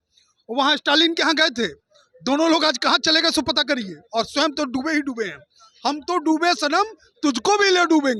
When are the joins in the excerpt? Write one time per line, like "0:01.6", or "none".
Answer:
none